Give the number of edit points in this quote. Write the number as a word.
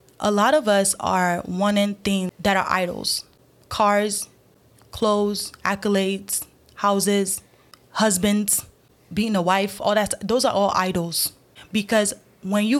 zero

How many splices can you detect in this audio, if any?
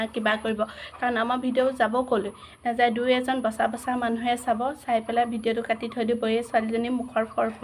zero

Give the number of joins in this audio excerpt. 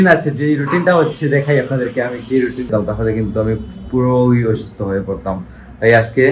one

